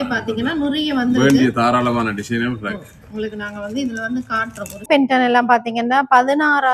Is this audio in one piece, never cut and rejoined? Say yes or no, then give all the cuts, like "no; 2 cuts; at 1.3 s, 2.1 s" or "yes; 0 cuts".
no; 1 cut; at 4.9 s